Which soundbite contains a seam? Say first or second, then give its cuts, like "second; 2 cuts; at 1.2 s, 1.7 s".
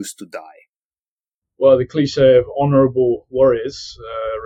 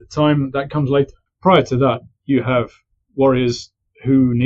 second; 1 cut; at 1.2 s